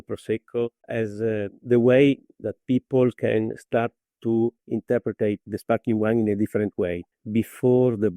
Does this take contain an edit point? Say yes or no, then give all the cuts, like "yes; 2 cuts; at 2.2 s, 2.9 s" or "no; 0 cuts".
yes; 1 cut; at 1.2 s